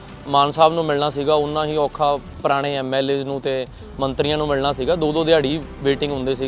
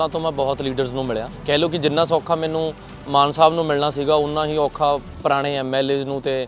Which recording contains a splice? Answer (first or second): second